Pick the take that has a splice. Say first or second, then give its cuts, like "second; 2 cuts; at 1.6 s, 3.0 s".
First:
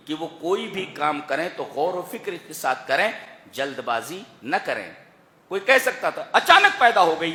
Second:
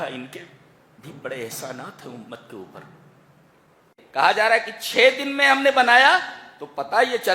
second; 1 cut; at 3.9 s